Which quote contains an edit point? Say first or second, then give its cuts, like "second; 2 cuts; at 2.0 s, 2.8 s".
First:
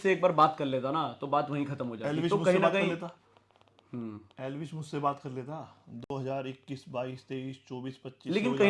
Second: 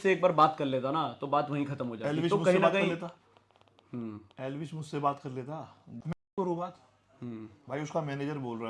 second; 1 cut; at 5.9 s